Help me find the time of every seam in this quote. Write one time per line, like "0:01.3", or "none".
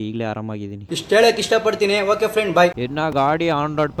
none